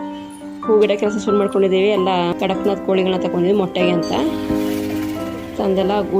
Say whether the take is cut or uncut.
cut